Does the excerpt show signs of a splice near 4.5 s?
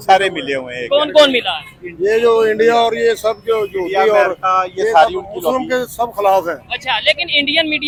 no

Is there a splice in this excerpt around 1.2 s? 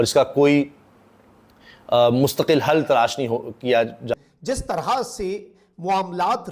no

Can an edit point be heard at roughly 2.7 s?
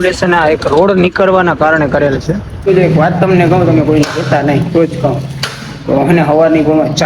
yes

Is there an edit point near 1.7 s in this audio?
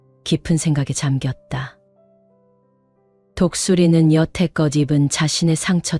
yes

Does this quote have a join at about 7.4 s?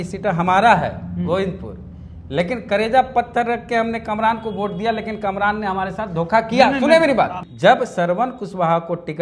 yes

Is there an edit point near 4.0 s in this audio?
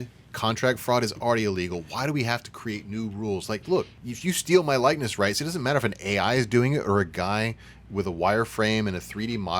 yes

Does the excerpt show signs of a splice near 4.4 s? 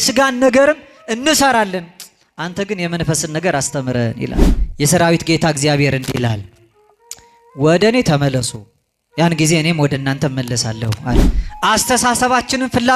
yes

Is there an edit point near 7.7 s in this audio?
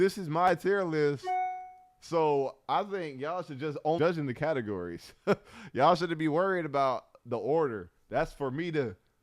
no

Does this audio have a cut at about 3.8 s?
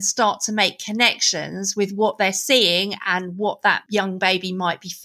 yes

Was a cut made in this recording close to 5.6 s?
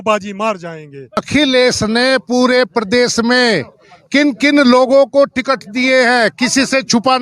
no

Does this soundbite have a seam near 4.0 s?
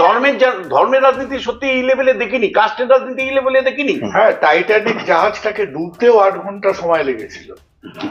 yes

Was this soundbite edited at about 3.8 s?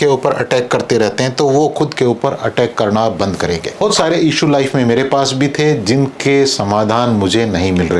yes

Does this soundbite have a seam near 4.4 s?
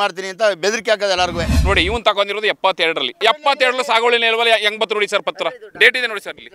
no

